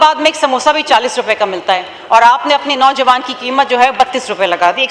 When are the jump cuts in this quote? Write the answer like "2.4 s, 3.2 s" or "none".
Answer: none